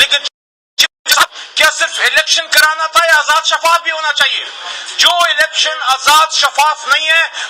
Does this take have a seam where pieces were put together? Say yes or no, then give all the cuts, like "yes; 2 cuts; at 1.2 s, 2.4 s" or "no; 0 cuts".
no; 0 cuts